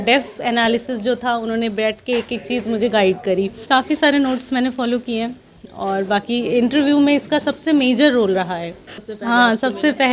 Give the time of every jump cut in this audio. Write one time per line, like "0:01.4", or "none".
0:03.6
0:09.1